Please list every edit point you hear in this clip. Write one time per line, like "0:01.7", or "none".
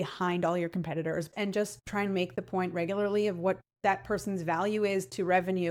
0:01.3